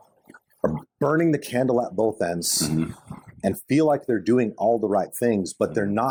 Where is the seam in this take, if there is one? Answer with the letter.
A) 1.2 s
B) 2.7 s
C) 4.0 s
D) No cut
D